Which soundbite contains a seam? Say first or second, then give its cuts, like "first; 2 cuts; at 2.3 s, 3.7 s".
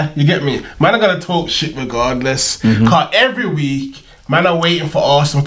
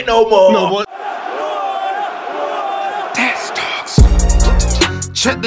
second; 1 cut; at 0.9 s